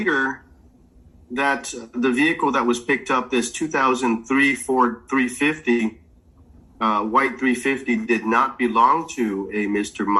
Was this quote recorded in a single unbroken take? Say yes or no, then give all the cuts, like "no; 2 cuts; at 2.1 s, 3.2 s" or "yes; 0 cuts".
yes; 0 cuts